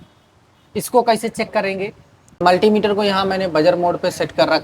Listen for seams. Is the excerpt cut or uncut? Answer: cut